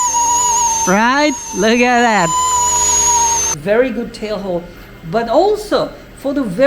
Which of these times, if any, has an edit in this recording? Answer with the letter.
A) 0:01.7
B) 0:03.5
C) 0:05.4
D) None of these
B